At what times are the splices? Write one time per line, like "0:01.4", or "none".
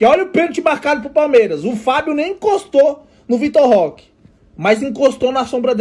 none